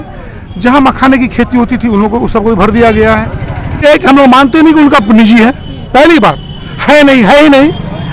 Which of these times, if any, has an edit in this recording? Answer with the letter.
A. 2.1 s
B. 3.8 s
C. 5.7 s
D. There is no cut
B